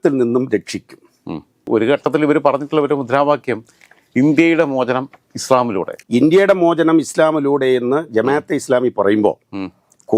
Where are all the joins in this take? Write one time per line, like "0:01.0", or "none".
0:01.1
0:05.9